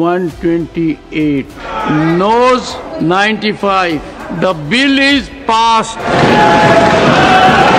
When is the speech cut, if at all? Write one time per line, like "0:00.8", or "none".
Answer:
0:01.8
0:02.8
0:04.2
0:06.1